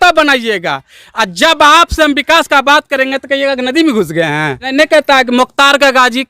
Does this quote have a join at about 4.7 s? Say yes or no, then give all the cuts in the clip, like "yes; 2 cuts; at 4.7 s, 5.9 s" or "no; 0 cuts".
yes; 1 cut; at 4.7 s